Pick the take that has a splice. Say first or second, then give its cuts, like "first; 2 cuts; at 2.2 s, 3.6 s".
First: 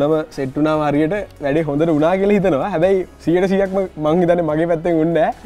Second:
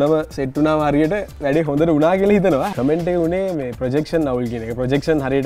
second; 1 cut; at 2.7 s